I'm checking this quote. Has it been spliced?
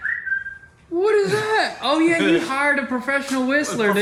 no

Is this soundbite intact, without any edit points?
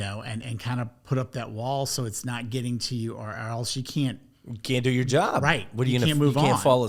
yes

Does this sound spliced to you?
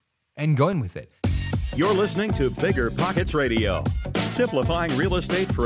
yes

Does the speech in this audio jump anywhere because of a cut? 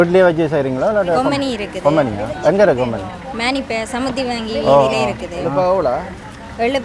no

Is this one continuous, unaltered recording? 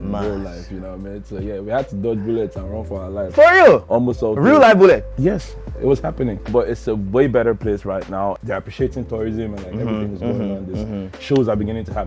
yes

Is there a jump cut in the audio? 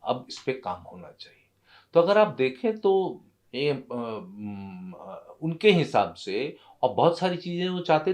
no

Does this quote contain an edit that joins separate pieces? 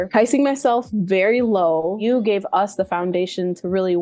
yes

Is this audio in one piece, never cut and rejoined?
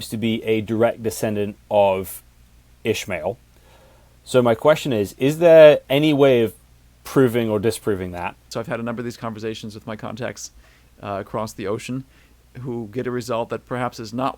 no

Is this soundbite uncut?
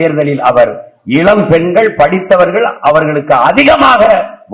yes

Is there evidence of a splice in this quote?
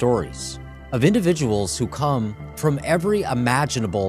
no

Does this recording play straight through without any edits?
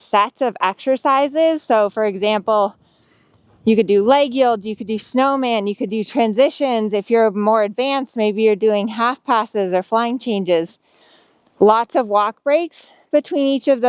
yes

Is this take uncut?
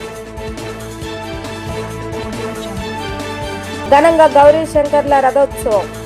no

